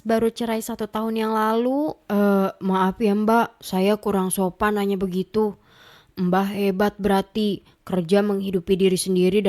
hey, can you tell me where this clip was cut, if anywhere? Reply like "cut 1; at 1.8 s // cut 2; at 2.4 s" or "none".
none